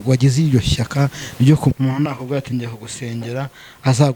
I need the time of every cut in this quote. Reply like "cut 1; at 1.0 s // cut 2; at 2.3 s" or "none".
cut 1; at 1.7 s